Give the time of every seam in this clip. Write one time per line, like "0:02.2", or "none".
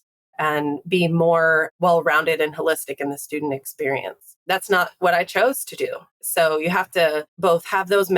0:01.7
0:06.2
0:07.3